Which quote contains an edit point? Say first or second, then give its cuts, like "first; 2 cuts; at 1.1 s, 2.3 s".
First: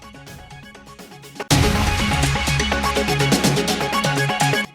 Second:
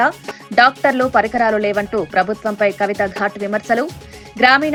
first; 1 cut; at 1.2 s